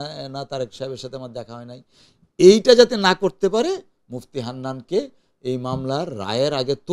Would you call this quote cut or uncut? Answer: uncut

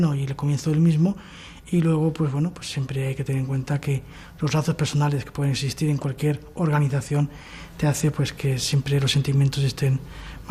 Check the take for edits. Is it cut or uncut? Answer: uncut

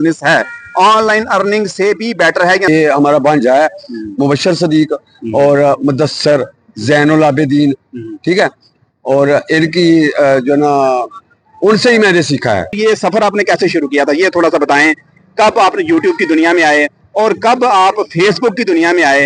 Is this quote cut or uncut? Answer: cut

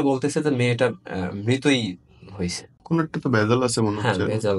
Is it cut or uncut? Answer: cut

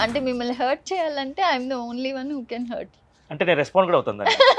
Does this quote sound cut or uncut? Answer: uncut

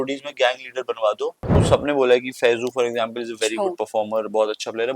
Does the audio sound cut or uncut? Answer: cut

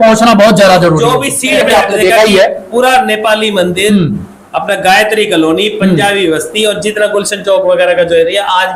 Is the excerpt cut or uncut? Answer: cut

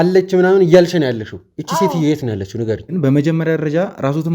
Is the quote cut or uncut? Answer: cut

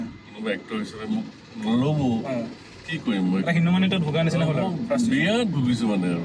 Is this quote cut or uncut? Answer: uncut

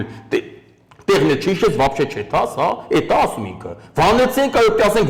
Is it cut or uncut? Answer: uncut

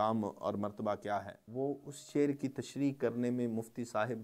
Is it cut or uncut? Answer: cut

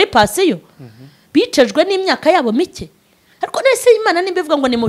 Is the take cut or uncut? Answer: uncut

